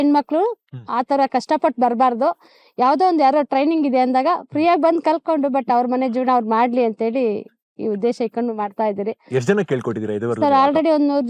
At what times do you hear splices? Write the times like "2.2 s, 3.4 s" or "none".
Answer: none